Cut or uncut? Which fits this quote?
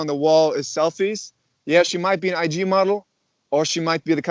uncut